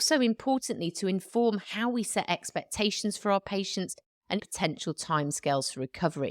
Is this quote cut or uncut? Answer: cut